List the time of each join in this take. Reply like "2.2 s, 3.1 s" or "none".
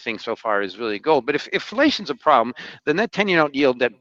none